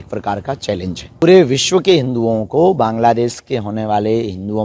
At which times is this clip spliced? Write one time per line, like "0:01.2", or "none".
0:01.2